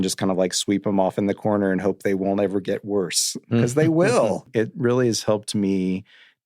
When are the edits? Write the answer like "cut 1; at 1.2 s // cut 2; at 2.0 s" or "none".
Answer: cut 1; at 4.5 s